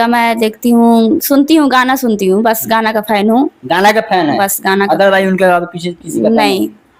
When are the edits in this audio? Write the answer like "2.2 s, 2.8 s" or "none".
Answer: none